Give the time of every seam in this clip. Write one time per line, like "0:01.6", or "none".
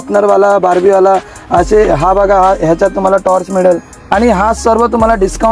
0:03.9